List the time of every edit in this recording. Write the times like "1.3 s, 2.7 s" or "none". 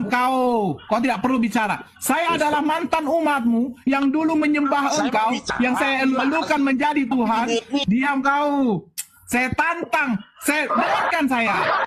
none